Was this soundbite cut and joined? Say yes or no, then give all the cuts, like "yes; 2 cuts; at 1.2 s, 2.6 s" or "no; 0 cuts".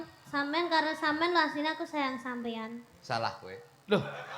no; 0 cuts